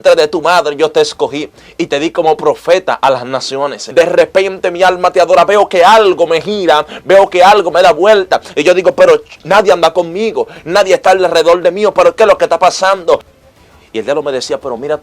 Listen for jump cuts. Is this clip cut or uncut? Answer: cut